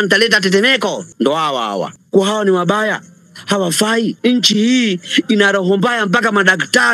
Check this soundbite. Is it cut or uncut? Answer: cut